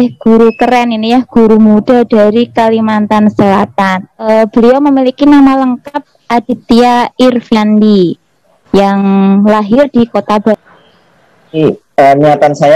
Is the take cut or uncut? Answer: cut